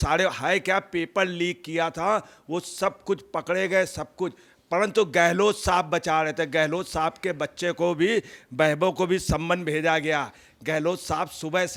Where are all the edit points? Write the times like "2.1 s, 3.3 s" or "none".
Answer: none